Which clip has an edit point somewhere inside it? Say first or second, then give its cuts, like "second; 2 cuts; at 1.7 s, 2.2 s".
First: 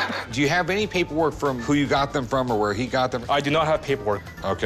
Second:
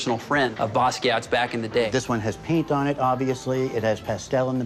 second; 1 cut; at 1.9 s